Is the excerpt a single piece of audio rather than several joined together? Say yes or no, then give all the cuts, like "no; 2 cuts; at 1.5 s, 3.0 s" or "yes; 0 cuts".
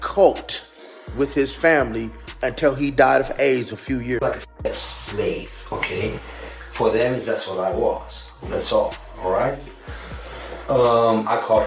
no; 1 cut; at 4.2 s